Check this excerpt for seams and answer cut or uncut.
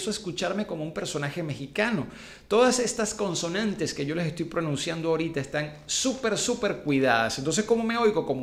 uncut